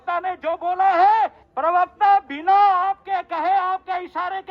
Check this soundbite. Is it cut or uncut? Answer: cut